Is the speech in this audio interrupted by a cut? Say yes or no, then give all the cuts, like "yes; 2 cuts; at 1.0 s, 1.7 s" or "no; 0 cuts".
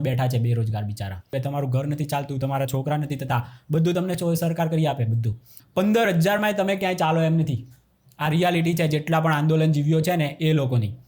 yes; 2 cuts; at 1.3 s, 5.6 s